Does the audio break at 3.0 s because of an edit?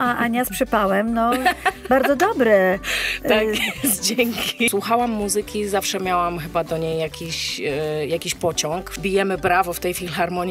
no; 2 cuts; at 4.7 s, 8.9 s

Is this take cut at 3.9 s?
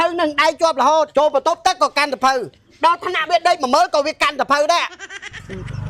no; 2 cuts; at 1.1 s, 5.1 s

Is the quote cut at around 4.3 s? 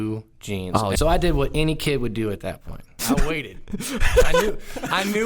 no; 2 cuts; at 0.9 s, 3.0 s

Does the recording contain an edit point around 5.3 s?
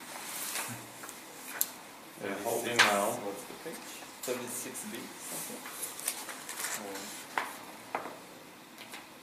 no; 1 cut; at 7.5 s

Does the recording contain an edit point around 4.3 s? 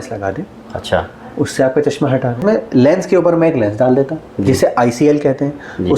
no; 1 cut; at 2.4 s

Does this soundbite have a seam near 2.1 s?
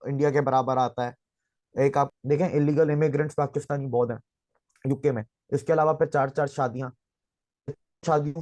yes; 1 cut; at 2.1 s

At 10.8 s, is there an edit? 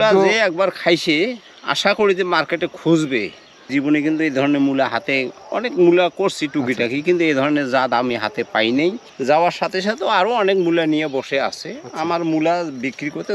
no; 2 cuts; at 3.7 s, 9.1 s

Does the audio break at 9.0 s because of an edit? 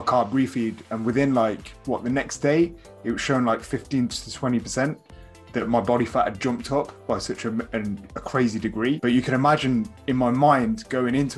yes; 1 cut; at 9.0 s

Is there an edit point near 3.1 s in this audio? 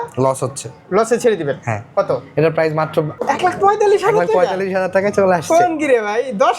yes; 1 cut; at 3.1 s

